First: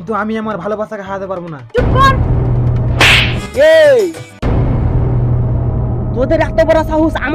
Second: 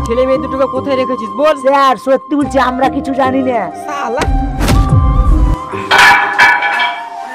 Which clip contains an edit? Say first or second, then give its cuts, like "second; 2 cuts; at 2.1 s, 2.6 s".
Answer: first; 1 cut; at 3.4 s